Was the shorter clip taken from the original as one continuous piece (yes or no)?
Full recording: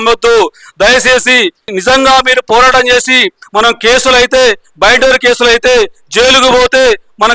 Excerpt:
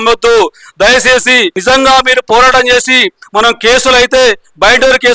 no